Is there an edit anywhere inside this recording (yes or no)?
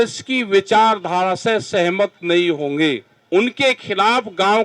yes